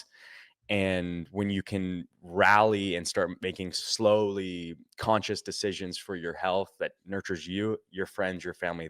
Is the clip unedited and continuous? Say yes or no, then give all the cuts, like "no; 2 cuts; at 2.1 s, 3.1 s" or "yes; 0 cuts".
no; 2 cuts; at 3.8 s, 7.0 s